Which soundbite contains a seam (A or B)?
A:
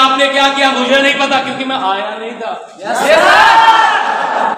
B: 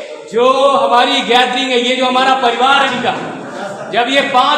B